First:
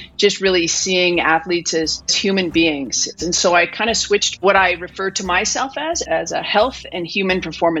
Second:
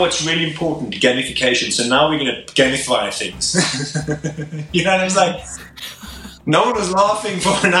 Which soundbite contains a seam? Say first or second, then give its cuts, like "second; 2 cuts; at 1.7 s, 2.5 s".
first; 4 cuts; at 2.2 s, 3.1 s, 4.4 s, 6.0 s